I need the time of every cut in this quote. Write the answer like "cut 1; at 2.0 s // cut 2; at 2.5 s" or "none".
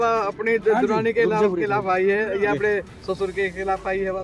none